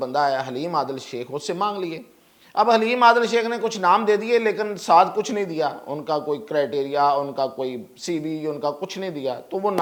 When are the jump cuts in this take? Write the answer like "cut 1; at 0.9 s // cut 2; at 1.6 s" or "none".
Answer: none